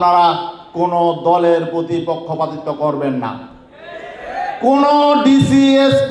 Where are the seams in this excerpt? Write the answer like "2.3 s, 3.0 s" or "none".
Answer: none

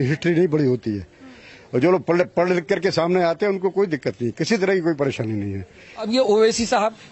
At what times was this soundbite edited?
6.1 s

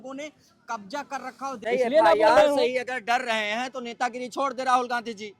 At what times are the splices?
1.6 s

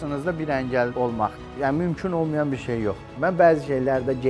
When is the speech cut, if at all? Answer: 1.3 s, 3.1 s

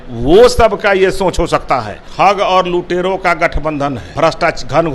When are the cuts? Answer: 2.0 s, 4.0 s

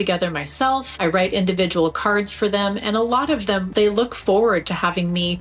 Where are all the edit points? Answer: none

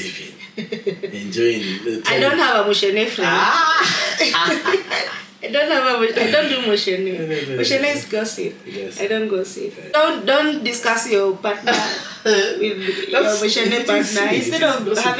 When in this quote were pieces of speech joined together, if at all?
9.9 s

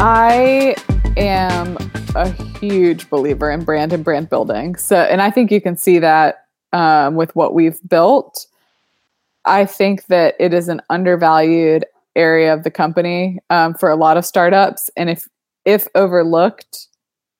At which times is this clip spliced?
none

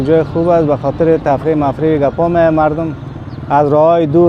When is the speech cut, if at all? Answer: none

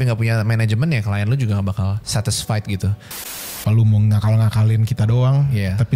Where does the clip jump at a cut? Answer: 2.0 s, 3.6 s

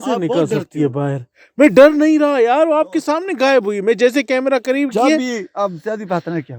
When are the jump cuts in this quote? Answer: none

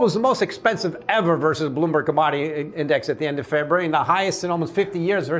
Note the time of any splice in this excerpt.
none

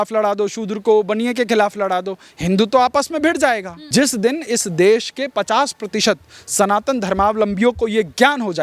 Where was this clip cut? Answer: 3.7 s

